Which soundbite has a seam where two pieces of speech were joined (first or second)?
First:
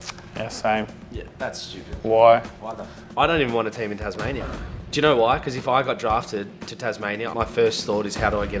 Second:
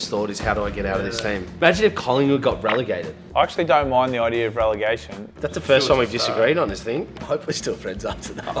second